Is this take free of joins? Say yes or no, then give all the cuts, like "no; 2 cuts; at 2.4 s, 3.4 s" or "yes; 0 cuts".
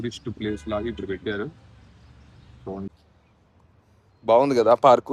no; 1 cut; at 2.9 s